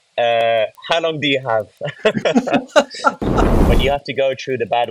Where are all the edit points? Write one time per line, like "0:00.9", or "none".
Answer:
0:03.6